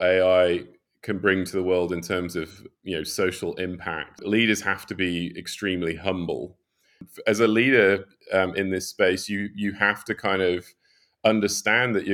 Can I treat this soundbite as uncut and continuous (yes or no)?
no